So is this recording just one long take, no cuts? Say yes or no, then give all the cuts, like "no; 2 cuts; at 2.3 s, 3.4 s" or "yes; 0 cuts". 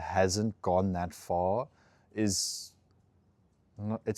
yes; 0 cuts